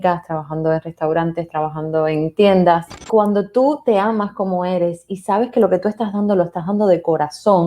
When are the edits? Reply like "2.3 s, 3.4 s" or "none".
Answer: 2.9 s